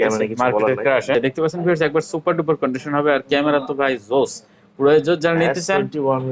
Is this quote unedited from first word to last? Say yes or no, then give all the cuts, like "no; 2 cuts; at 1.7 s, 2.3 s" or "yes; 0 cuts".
no; 1 cut; at 1.1 s